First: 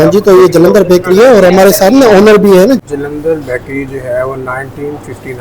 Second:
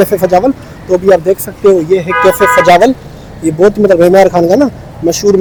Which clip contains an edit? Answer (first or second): first